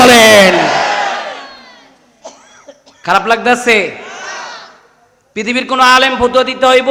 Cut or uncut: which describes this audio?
uncut